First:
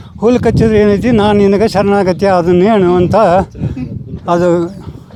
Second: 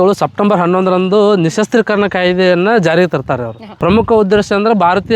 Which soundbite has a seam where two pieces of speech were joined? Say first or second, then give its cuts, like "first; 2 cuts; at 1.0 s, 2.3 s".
second; 1 cut; at 3.7 s